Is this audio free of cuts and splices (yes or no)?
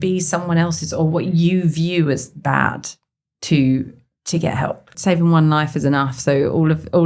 no